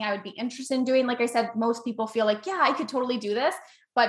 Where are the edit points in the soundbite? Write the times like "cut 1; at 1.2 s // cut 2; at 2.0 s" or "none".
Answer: none